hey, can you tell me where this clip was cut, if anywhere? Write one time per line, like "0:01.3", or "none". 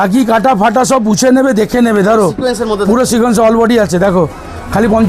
none